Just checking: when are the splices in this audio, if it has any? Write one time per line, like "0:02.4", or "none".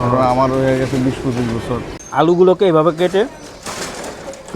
0:02.0